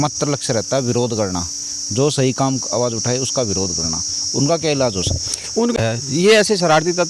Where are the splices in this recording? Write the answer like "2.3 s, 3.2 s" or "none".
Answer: 5.8 s